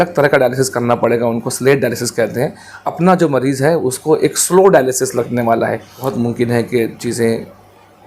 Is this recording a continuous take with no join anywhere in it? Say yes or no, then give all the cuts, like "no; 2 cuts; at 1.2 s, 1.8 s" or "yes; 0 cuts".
no; 2 cuts; at 2.8 s, 6.0 s